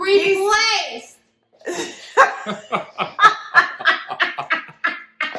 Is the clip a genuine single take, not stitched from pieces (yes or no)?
yes